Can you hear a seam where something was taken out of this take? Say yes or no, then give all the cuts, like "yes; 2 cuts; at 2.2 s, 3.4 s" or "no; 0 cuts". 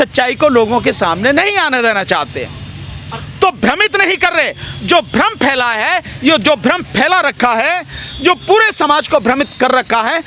no; 0 cuts